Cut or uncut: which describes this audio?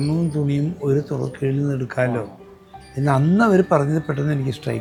uncut